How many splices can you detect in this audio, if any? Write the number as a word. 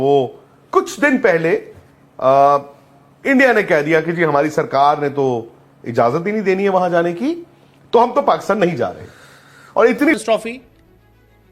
one